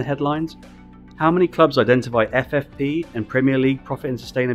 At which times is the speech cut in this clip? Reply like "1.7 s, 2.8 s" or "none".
none